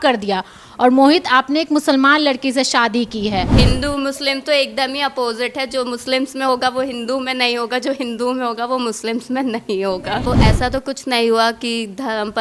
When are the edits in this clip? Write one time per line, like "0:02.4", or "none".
0:03.5
0:10.3